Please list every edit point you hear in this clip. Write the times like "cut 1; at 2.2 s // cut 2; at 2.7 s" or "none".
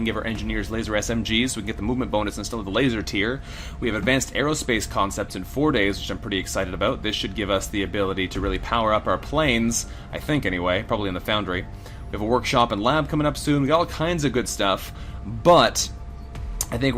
cut 1; at 10.2 s